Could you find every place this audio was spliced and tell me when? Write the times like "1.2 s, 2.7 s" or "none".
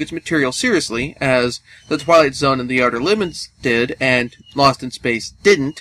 4.2 s